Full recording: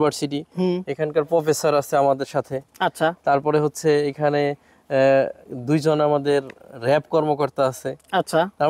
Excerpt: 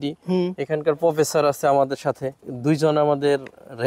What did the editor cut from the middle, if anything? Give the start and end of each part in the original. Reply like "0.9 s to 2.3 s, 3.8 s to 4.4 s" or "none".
2.7 s to 5.4 s